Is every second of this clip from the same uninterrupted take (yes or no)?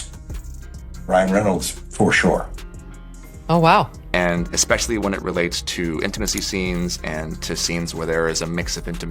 no